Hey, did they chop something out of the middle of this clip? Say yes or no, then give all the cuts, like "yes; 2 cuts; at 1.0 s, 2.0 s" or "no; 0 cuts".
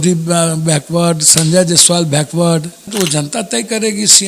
yes; 1 cut; at 2.9 s